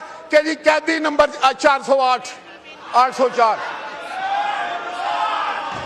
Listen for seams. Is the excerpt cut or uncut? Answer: uncut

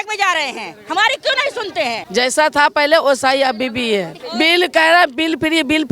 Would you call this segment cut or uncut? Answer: cut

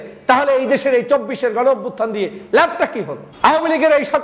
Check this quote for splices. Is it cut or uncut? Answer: cut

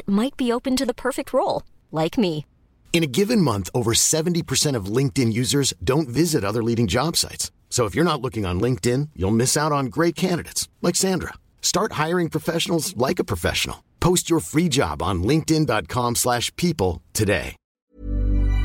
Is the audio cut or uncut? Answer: cut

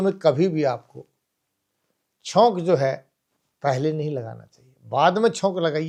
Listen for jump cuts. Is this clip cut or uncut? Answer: uncut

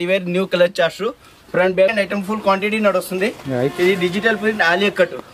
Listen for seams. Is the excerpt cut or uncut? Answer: cut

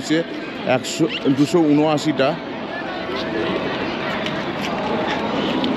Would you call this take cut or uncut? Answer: uncut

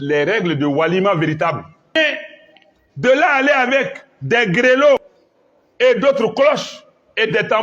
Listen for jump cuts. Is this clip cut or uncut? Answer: cut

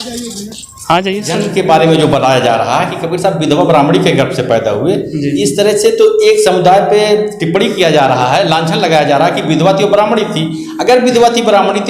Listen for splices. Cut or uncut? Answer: cut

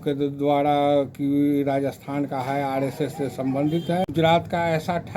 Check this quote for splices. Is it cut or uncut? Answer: cut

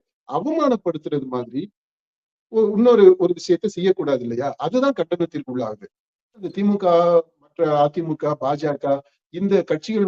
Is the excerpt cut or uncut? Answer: cut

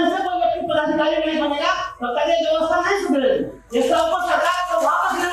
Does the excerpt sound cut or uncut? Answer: uncut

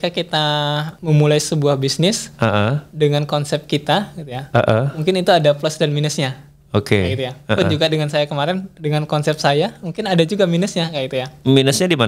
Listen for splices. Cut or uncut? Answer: cut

